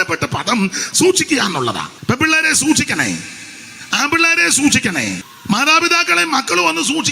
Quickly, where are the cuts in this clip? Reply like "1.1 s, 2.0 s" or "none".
1.9 s, 5.3 s